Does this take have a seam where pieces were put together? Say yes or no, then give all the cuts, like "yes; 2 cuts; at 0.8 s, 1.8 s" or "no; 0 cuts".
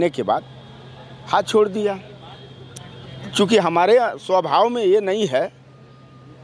no; 0 cuts